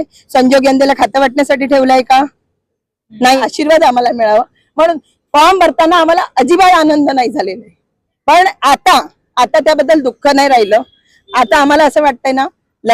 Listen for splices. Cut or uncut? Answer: cut